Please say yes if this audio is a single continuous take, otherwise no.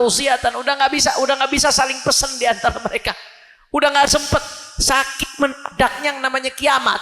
yes